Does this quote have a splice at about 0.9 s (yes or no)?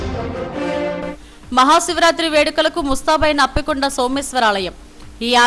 yes